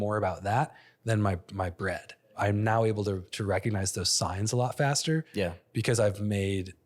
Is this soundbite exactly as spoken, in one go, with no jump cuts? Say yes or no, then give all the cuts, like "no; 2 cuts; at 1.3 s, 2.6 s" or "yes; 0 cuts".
no; 1 cut; at 2.4 s